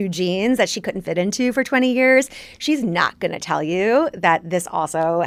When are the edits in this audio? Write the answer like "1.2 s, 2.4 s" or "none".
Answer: none